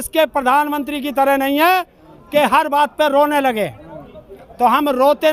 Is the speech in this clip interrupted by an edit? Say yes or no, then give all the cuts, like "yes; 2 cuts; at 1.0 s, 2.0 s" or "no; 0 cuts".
no; 0 cuts